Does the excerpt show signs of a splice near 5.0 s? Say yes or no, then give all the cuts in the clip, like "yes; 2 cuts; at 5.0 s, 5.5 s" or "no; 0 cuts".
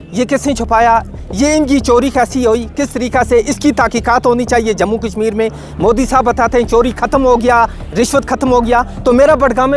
no; 0 cuts